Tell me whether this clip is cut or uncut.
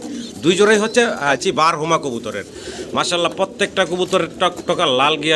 cut